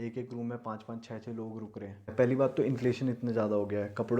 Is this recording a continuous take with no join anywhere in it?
no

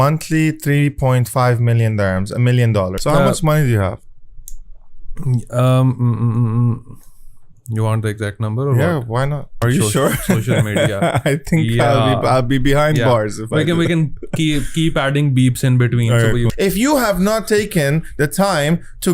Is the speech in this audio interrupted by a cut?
yes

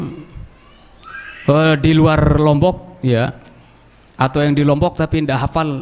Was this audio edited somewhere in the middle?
no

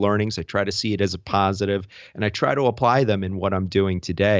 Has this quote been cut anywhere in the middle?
no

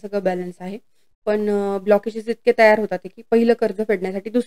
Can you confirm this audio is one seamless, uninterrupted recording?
yes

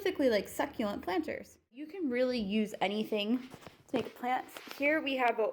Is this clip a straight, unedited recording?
no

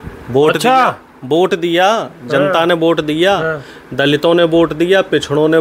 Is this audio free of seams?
yes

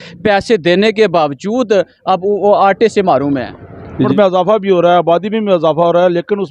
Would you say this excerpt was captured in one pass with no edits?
no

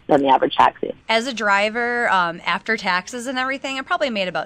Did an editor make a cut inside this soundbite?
yes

